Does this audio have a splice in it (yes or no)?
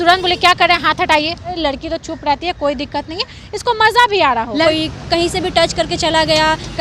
yes